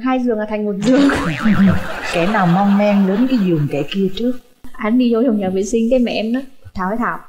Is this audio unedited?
no; 1 cut; at 4.7 s

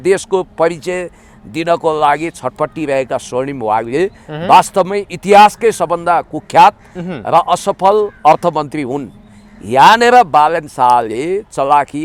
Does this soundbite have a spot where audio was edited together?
no; 0 cuts

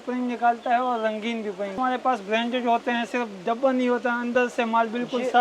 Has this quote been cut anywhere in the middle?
yes; 1 cut; at 1.8 s

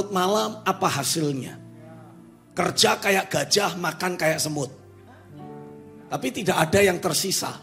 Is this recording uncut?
yes; 0 cuts

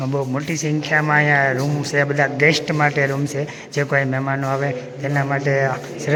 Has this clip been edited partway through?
no; 0 cuts

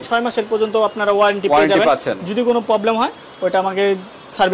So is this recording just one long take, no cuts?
yes; 0 cuts

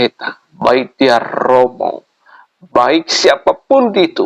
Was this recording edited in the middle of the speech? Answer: no; 0 cuts

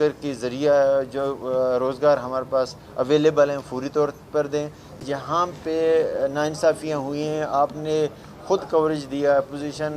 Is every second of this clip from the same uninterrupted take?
no; 1 cut; at 5.0 s

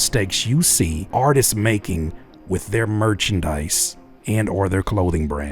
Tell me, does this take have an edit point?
yes; 1 cut; at 1.0 s

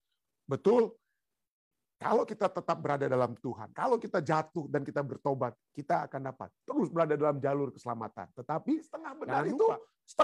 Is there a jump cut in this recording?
yes; 1 cut; at 9.2 s

